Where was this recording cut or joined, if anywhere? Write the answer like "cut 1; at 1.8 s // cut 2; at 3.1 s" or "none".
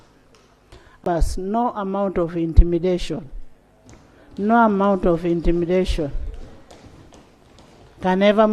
cut 1; at 1.1 s